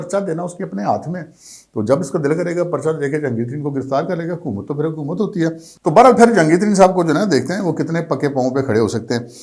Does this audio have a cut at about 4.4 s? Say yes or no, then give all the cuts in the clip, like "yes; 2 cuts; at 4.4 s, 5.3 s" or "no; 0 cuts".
no; 0 cuts